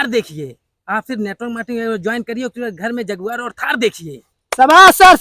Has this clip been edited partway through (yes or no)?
no